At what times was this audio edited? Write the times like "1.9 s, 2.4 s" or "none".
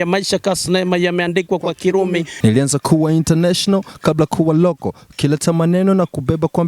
2.3 s